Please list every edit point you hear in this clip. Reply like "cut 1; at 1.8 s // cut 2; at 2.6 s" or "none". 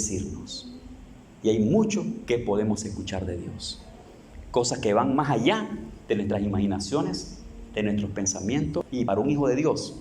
cut 1; at 8.9 s